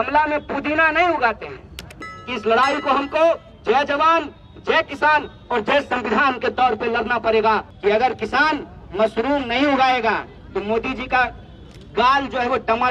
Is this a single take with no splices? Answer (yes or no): no